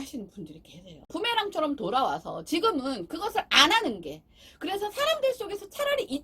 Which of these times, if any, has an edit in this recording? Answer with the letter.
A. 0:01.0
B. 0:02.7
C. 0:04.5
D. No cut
A